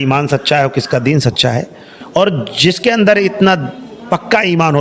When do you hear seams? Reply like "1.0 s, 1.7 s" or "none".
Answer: 2.0 s

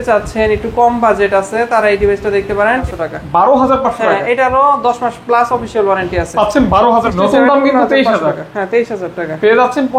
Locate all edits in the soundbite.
2.8 s, 7.1 s

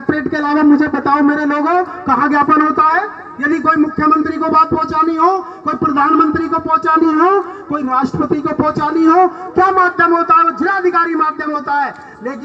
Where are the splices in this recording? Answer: none

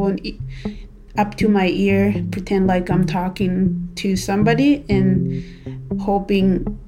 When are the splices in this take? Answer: none

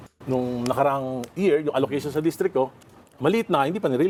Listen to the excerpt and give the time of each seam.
none

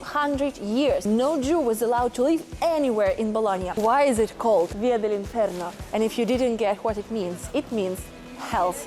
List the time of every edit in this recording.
1.0 s, 3.7 s, 4.7 s

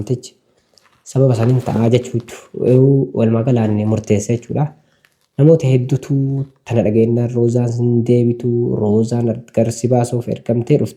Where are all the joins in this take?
none

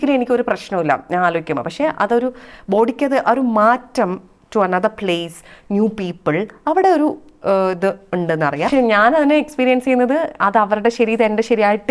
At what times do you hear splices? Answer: 8.7 s

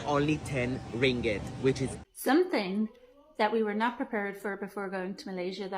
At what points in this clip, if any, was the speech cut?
2.0 s

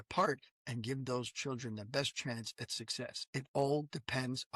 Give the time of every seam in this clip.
3.2 s

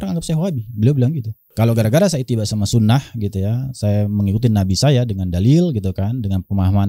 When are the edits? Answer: 1.4 s

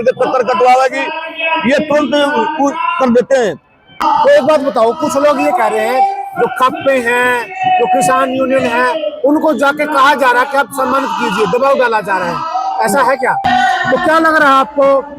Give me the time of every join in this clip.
4.0 s, 13.4 s

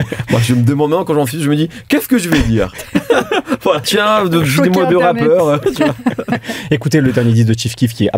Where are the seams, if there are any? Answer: 3.9 s

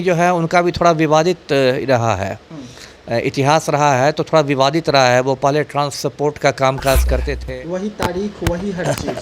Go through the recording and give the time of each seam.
7.3 s

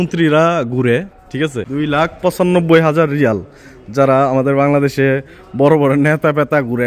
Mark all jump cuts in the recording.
1.6 s

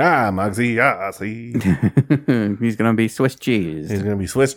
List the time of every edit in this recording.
none

